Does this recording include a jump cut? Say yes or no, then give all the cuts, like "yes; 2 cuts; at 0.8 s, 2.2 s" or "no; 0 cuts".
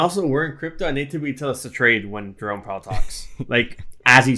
no; 0 cuts